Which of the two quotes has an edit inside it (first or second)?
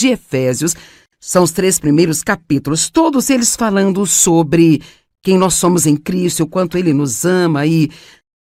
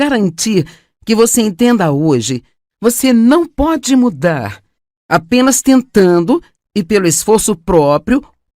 second